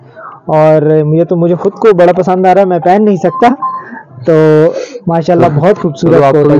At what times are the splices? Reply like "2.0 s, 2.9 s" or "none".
none